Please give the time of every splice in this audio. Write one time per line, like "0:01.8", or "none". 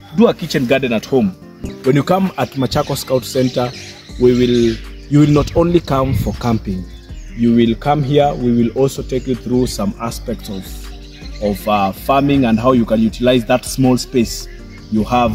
0:01.5